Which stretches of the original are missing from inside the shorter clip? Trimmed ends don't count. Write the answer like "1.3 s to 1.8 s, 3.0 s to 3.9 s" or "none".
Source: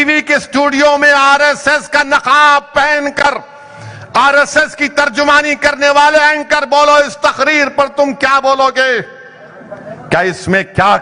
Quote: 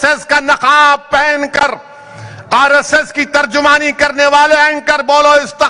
none